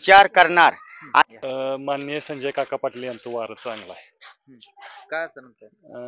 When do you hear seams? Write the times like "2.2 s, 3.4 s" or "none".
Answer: 1.2 s